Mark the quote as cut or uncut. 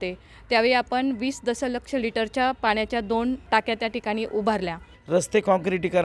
cut